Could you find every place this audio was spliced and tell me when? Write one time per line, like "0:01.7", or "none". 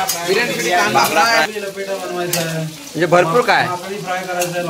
0:01.5